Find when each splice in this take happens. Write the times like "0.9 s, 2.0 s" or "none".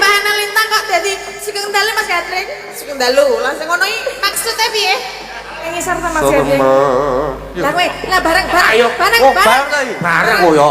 5.7 s

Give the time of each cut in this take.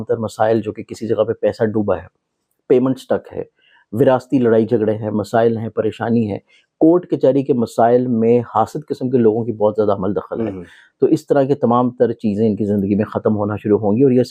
none

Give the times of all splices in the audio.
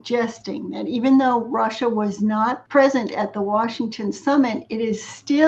2.6 s

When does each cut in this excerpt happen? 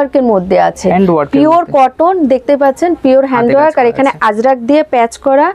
none

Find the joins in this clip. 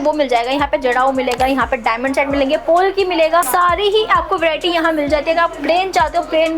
none

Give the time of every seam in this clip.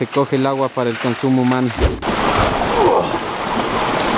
1.8 s

